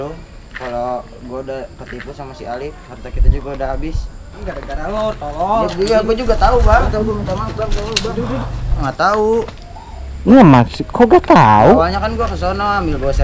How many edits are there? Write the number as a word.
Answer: three